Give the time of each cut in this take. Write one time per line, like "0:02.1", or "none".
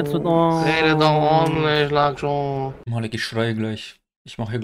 none

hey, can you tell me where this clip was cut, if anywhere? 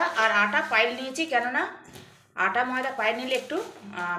none

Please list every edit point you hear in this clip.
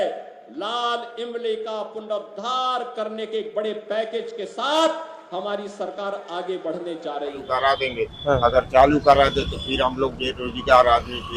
0:07.5

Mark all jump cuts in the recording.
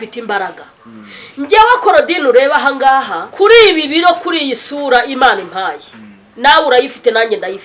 0:03.2

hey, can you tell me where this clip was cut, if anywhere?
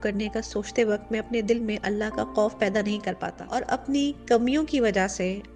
0:03.3

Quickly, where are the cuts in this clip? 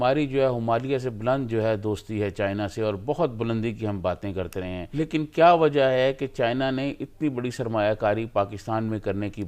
0:04.8

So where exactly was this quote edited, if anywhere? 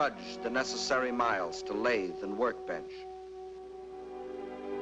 none

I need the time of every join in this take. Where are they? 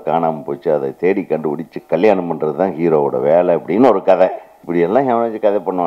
0:04.5

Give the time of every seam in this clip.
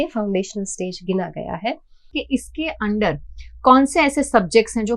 0:02.2

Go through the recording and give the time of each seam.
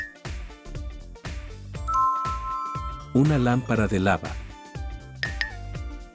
none

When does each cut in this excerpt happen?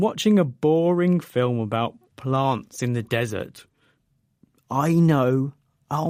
none

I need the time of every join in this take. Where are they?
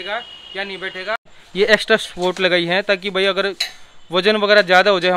0:01.4

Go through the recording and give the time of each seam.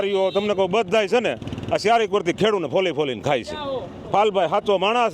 0:04.0

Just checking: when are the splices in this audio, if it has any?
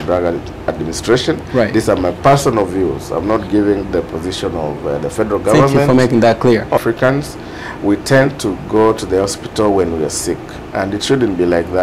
0:06.8

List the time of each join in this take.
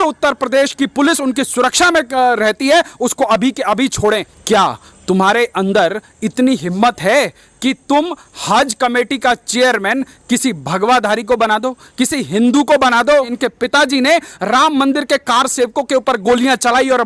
0:04.3
0:13.3

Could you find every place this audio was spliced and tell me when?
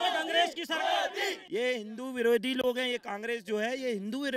0:01.4

